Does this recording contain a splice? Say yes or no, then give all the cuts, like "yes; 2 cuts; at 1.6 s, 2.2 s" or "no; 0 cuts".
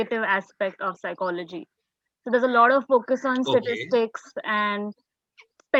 no; 0 cuts